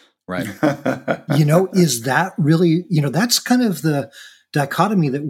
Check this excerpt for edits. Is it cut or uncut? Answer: uncut